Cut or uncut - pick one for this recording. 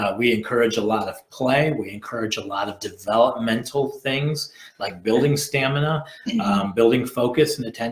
uncut